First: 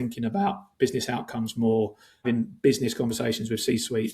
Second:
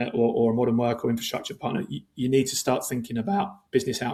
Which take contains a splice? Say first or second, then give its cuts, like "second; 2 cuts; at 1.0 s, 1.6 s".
first; 1 cut; at 2.2 s